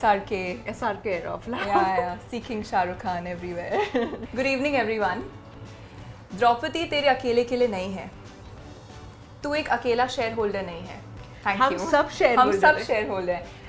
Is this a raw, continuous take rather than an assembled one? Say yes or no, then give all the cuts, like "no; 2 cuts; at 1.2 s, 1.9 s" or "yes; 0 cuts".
no; 1 cut; at 4.2 s